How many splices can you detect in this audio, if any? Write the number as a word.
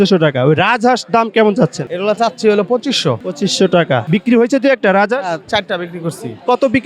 three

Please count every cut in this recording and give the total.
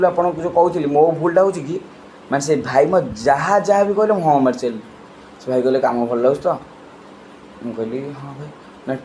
zero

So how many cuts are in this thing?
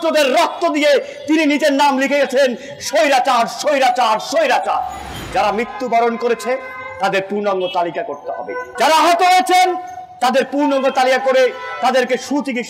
two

